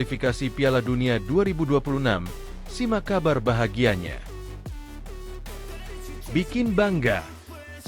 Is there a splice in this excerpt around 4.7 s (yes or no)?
yes